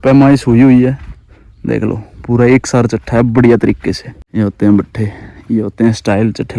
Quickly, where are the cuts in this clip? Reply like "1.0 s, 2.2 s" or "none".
4.1 s